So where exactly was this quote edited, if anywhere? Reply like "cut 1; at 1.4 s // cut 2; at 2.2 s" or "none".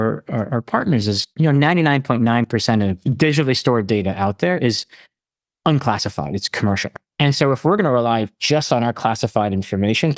cut 1; at 1.3 s // cut 2; at 3.0 s